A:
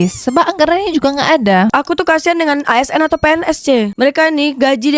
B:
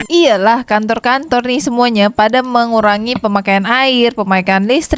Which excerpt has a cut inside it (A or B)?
A